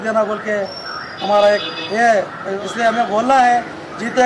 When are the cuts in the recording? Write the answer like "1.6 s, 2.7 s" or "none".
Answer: 2.4 s